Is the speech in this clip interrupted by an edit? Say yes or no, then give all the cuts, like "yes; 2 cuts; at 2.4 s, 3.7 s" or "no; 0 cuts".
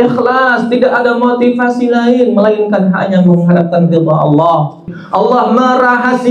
yes; 1 cut; at 5.0 s